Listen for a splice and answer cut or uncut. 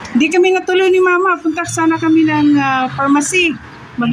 uncut